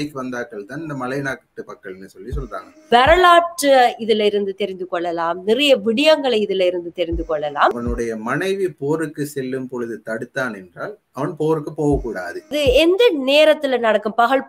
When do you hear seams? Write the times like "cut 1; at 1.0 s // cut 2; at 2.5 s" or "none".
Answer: cut 1; at 2.9 s // cut 2; at 7.7 s // cut 3; at 12.5 s